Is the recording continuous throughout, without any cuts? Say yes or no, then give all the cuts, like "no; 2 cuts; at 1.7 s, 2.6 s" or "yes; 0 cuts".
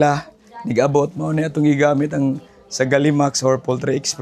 yes; 0 cuts